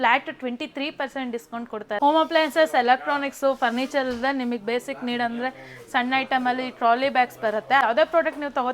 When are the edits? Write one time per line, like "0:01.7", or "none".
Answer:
0:02.0
0:07.8